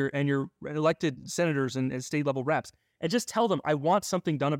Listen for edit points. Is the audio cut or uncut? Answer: cut